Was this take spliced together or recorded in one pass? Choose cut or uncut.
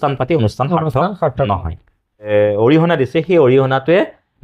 cut